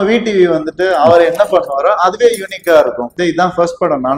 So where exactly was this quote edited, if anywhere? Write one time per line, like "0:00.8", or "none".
0:03.1